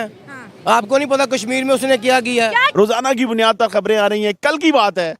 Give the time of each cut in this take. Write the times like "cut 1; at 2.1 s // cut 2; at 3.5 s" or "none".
cut 1; at 2.7 s